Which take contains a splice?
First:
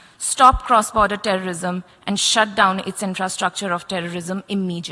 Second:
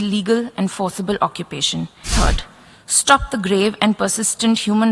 second; 1 cut; at 2.1 s

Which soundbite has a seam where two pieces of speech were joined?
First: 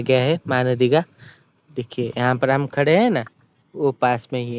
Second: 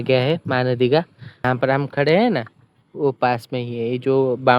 second; 1 cut; at 1.4 s

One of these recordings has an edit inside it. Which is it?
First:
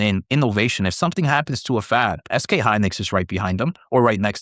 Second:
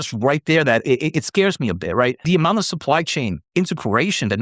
second; 1 cut; at 2.2 s

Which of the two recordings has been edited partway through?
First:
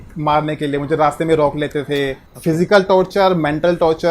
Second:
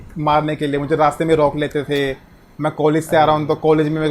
first; 1 cut; at 2.3 s

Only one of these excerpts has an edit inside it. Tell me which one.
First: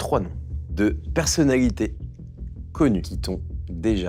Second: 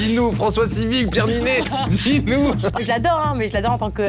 second; 1 cut; at 2.8 s

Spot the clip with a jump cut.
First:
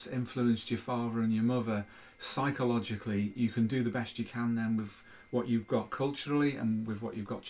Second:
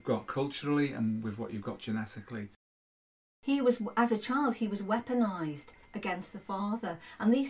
second; 1 cut; at 3.2 s

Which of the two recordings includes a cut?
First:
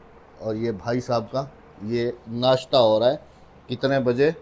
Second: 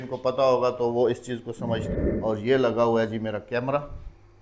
second; 1 cut; at 1.9 s

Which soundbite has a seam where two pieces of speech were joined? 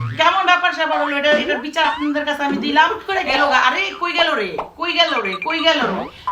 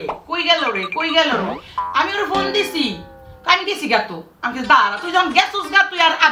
first; 1 cut; at 3.0 s

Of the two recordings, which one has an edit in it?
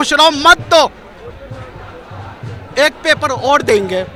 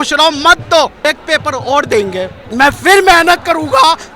second; 2 cuts; at 1.0 s, 2.4 s

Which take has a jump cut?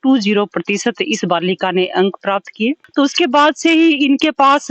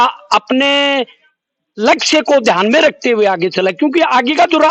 first; 1 cut; at 2.8 s

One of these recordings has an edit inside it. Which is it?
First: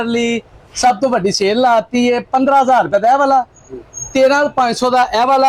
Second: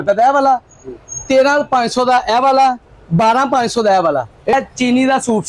second; 1 cut; at 4.5 s

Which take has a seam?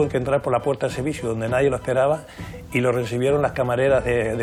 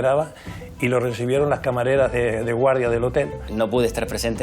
second; 1 cut; at 3.4 s

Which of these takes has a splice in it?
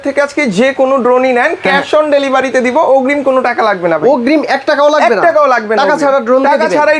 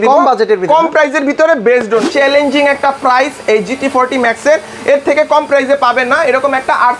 second; 1 cut; at 2.1 s

